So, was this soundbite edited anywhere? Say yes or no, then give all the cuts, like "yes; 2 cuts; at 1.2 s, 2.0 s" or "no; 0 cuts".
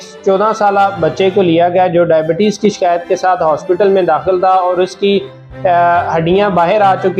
no; 0 cuts